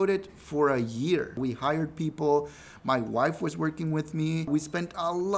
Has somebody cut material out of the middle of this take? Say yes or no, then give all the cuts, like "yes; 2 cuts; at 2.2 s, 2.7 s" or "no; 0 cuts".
yes; 2 cuts; at 1.4 s, 4.5 s